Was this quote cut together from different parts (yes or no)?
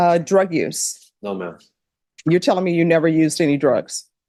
no